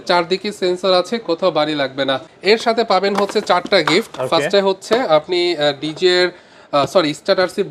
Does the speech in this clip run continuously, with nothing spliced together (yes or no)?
no